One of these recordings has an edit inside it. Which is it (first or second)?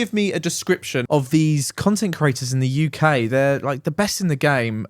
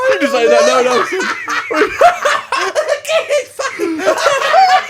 first